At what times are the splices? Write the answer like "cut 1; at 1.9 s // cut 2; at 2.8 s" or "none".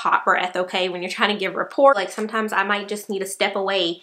cut 1; at 1.9 s